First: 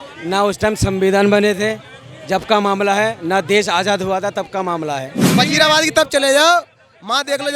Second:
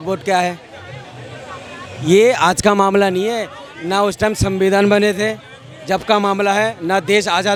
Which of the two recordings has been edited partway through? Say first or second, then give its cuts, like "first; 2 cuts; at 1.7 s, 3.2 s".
first; 1 cut; at 5.2 s